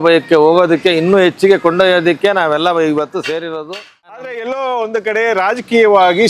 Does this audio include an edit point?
yes; 1 cut; at 4.3 s

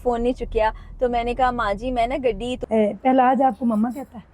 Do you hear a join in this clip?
yes; 1 cut; at 2.5 s

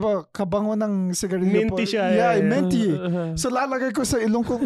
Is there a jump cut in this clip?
no; 0 cuts

